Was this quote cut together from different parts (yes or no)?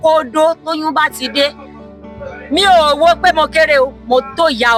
no